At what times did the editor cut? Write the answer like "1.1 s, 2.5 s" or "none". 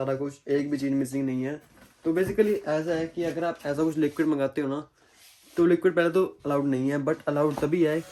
none